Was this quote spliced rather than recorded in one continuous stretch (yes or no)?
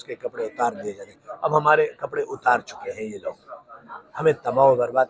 no